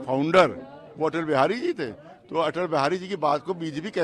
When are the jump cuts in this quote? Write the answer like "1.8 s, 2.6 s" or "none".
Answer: none